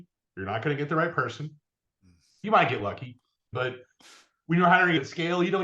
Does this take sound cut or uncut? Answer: cut